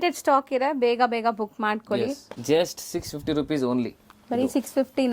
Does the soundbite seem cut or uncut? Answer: cut